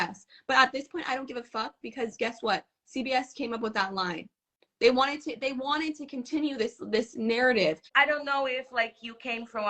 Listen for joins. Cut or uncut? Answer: cut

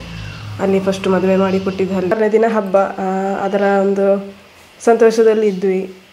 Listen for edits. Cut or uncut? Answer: cut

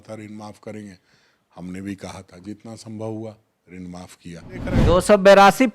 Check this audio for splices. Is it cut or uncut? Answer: cut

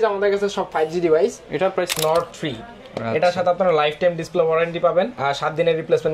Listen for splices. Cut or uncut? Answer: cut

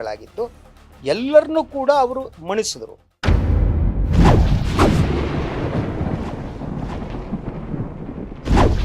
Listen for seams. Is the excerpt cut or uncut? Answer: cut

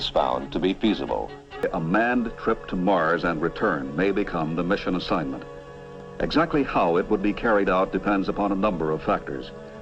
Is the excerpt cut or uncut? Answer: cut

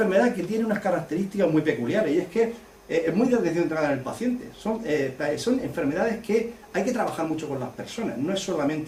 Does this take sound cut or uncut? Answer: uncut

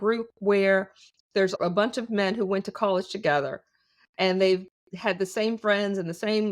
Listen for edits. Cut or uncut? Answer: cut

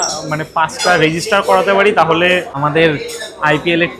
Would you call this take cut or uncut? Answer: cut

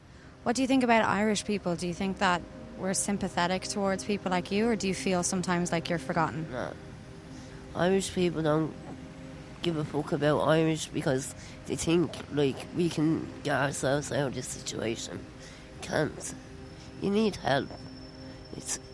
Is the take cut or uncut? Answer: uncut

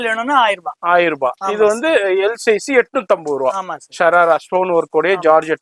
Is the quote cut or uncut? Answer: uncut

